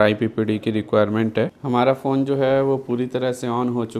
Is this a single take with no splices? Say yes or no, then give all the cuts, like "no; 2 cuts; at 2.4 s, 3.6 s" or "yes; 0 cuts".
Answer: no; 1 cut; at 1.6 s